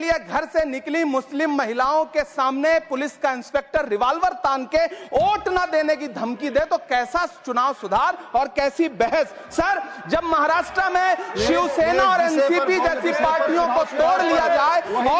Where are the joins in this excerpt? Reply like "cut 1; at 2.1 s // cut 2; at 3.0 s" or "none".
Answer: none